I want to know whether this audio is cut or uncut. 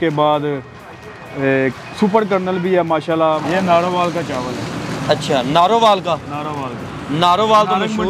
cut